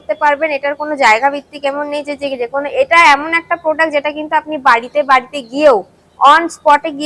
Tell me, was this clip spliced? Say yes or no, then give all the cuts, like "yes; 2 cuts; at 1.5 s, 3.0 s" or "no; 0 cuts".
no; 0 cuts